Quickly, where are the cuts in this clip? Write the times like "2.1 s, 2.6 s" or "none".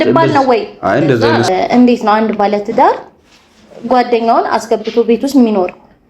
1.5 s